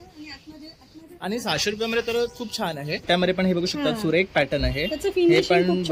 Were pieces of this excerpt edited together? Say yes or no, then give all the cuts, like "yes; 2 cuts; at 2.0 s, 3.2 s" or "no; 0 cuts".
yes; 1 cut; at 3.1 s